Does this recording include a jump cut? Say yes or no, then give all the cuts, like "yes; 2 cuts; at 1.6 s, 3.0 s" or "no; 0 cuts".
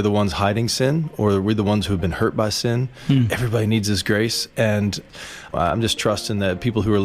yes; 1 cut; at 5.5 s